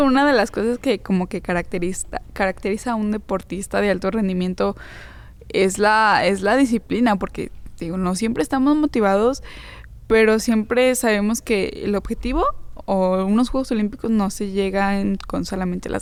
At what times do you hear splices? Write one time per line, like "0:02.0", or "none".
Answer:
none